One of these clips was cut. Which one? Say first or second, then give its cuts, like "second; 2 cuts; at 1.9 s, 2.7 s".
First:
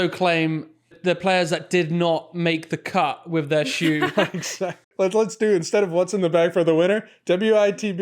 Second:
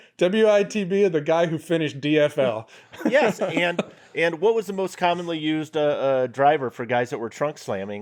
first; 2 cuts; at 0.9 s, 4.9 s